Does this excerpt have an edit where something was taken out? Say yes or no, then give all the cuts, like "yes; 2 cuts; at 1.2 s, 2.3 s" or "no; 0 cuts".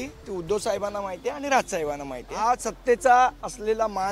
yes; 1 cut; at 2.4 s